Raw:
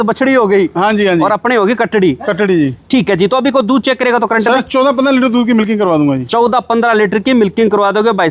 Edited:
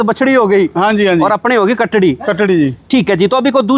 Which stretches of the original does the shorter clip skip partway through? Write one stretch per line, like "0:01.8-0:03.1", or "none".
none